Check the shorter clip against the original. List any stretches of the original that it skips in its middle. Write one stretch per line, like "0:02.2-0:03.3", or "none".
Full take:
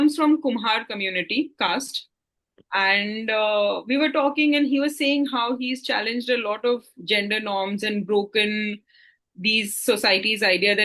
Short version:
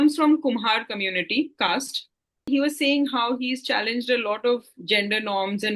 0:02.5-0:04.7